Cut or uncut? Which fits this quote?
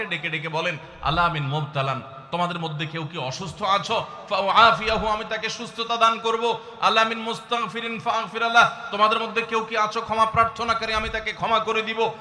uncut